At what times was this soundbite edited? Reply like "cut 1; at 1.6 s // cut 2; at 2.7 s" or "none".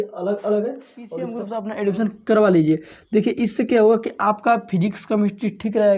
cut 1; at 1.4 s

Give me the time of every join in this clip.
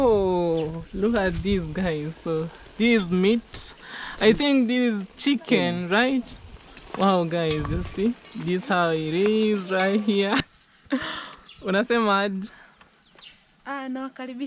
cut 1; at 10.5 s

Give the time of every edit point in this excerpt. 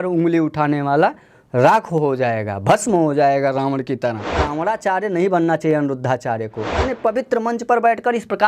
cut 1; at 4.4 s // cut 2; at 6.8 s

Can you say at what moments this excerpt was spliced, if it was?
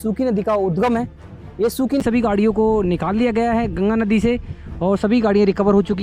cut 1; at 2.0 s

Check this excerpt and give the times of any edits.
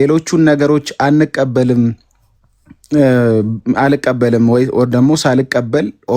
none

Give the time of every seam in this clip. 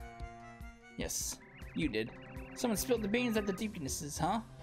cut 1; at 3.6 s

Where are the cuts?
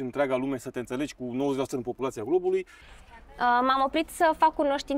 cut 1; at 2.8 s

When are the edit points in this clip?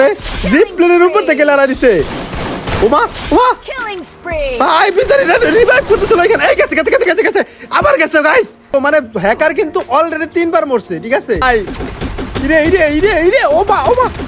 cut 1; at 8.7 s // cut 2; at 11.4 s

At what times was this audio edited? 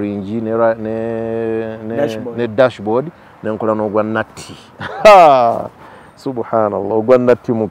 none

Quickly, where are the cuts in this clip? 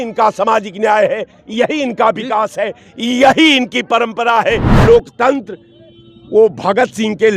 cut 1; at 4.7 s

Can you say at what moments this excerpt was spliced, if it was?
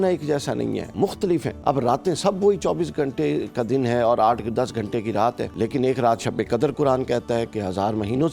cut 1; at 1.3 s // cut 2; at 5.5 s

